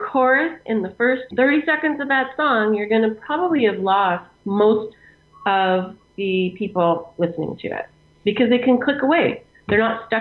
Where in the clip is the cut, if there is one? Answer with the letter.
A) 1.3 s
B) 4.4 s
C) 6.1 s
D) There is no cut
A